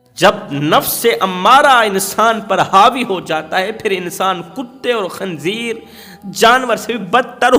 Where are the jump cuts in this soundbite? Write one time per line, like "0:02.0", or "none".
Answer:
none